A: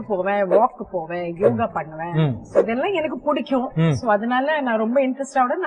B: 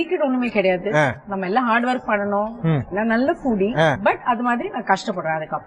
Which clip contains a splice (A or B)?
B